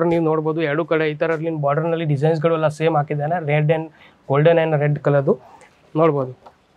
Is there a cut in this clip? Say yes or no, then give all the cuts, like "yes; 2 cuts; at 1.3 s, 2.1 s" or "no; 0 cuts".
yes; 1 cut; at 5.6 s